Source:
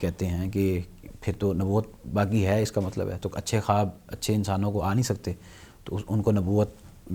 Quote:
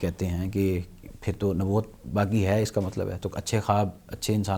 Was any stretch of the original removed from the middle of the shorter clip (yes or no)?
no